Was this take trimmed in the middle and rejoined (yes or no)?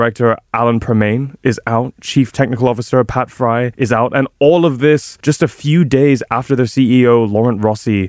yes